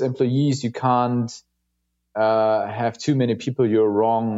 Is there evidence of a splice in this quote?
no; 0 cuts

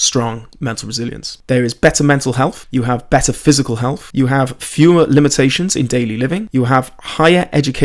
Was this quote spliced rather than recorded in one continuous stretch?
yes; 4 cuts; at 1.3 s, 2.6 s, 4.0 s, 6.5 s

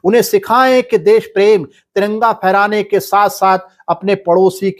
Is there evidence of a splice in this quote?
no; 0 cuts

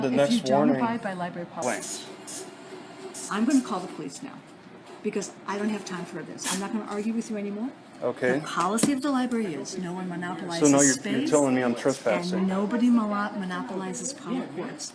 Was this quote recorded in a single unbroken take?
no; 1 cut; at 1.6 s

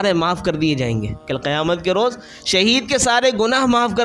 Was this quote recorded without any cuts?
no; 1 cut; at 1.2 s

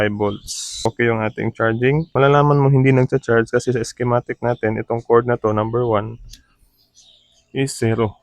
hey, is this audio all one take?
no; 2 cuts; at 0.8 s, 2.1 s

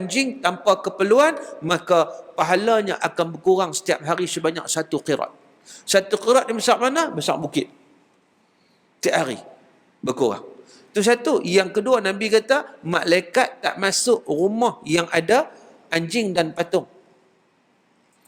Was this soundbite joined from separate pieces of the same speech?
no; 0 cuts

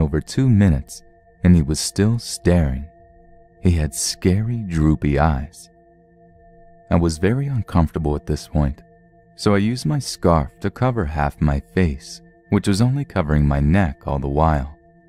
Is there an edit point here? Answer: no; 0 cuts

